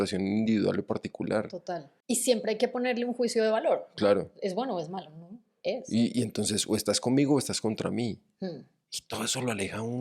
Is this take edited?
yes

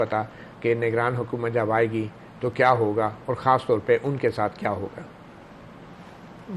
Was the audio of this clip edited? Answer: no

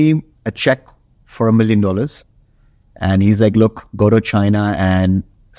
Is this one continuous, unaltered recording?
yes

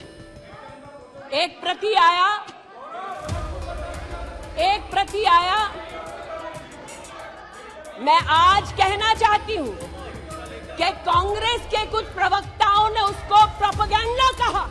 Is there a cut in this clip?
no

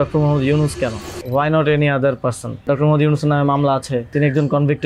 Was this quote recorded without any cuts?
no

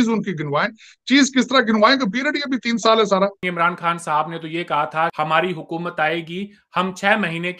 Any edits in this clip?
yes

